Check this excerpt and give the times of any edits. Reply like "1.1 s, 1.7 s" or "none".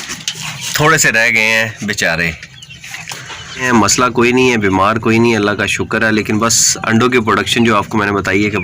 3.6 s